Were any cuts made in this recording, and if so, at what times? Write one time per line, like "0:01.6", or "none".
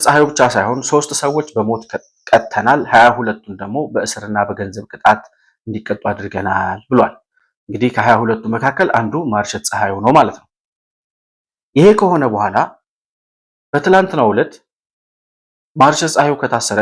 none